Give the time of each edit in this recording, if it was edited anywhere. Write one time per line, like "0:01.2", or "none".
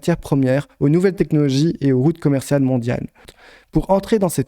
0:03.2